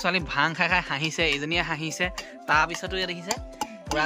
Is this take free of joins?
yes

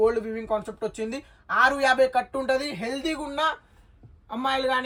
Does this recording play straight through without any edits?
yes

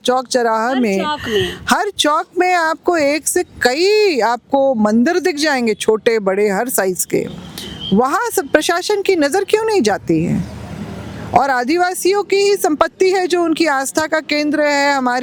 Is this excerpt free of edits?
yes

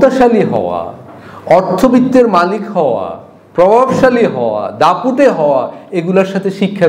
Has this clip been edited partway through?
no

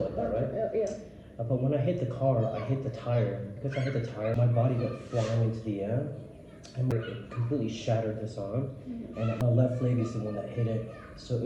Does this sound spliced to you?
yes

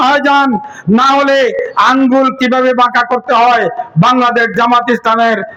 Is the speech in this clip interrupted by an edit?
no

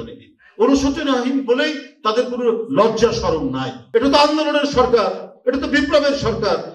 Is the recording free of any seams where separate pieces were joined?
no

